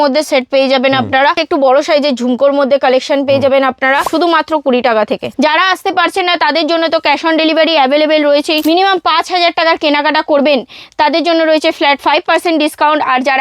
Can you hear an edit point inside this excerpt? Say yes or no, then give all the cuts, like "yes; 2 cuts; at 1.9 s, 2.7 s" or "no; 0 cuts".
yes; 4 cuts; at 1.4 s, 4.1 s, 5.3 s, 8.6 s